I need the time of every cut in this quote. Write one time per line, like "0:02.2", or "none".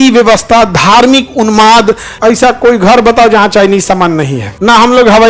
0:02.1
0:04.4